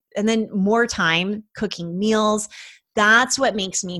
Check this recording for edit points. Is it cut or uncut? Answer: uncut